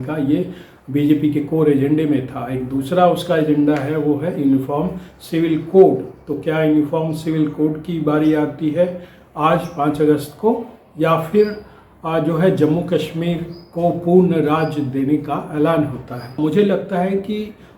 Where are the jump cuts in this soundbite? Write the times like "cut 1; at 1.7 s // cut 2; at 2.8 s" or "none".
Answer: cut 1; at 16.3 s